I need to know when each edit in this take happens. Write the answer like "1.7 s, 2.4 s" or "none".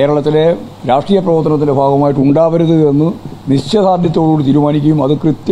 none

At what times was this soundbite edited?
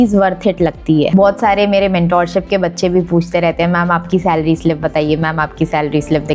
1.1 s

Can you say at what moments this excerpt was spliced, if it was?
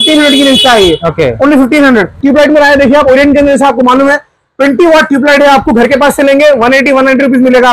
2.2 s

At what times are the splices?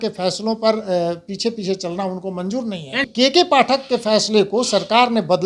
3.0 s

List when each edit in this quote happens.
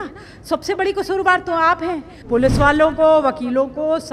2.1 s

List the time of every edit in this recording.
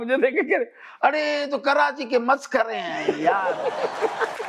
none

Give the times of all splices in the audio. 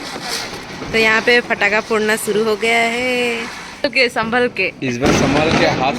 3.8 s

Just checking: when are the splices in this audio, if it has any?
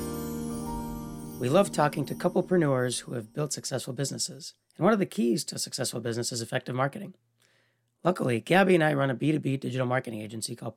1.2 s

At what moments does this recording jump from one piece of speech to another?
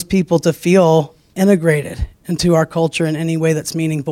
1.2 s

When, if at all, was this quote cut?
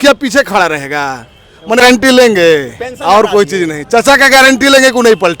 1.8 s

